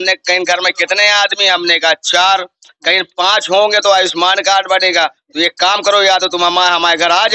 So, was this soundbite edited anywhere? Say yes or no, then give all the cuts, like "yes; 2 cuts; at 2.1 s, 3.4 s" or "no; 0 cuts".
no; 0 cuts